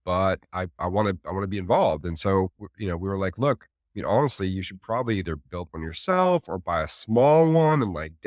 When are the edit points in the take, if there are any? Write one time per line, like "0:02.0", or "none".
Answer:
none